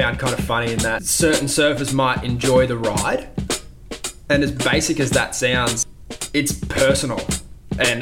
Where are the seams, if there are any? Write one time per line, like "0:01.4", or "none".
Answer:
0:01.1
0:05.8